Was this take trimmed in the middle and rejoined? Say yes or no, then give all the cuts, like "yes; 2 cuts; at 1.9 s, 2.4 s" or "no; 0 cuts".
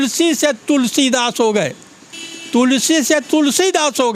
no; 0 cuts